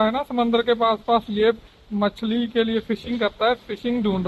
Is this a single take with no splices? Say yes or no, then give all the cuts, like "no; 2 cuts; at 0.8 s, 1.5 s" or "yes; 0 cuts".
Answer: yes; 0 cuts